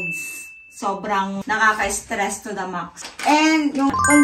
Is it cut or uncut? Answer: cut